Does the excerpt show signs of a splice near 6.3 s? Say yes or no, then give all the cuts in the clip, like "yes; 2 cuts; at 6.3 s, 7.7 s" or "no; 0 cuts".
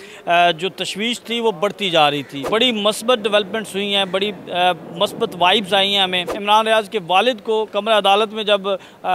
yes; 2 cuts; at 2.4 s, 6.3 s